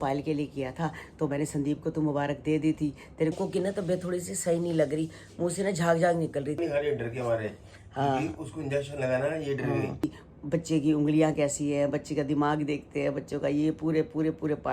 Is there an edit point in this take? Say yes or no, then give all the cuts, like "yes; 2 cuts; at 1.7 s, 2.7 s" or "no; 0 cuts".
yes; 3 cuts; at 3.3 s, 6.6 s, 10.2 s